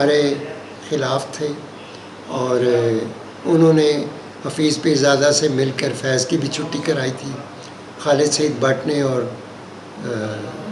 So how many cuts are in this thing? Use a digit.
0